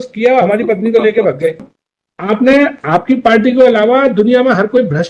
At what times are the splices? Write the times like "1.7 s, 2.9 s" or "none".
1.6 s